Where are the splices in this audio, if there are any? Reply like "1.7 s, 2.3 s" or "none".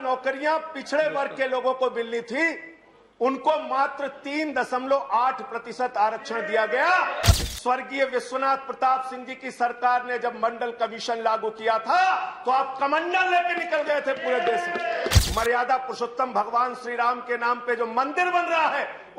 7.3 s, 15.2 s